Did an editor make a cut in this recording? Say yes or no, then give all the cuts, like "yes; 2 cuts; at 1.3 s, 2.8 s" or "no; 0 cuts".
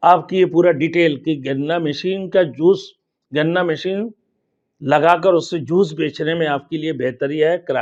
no; 0 cuts